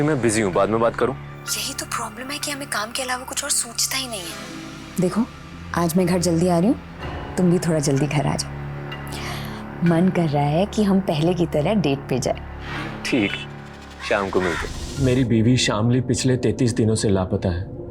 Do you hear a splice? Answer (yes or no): yes